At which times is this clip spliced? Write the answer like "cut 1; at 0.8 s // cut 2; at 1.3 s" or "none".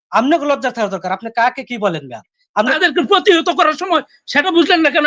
cut 1; at 2.7 s